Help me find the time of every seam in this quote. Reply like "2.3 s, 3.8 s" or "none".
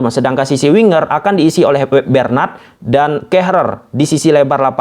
none